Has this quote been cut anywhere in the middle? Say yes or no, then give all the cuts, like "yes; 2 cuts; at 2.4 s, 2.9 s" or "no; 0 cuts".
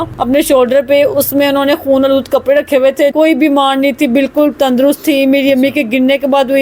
yes; 1 cut; at 3.1 s